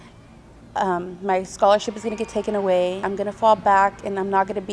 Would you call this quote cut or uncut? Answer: cut